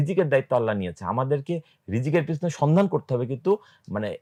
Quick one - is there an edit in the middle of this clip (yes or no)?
no